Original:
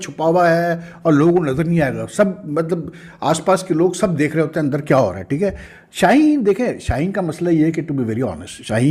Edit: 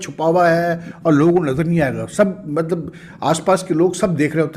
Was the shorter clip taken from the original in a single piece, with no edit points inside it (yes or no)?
yes